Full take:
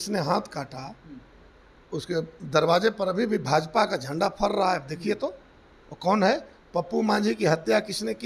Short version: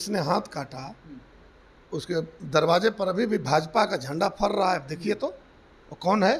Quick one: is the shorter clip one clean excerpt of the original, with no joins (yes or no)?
yes